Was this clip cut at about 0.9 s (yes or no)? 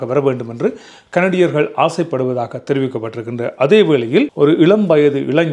no